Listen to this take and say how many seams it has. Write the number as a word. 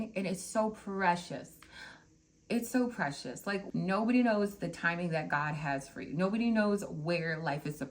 one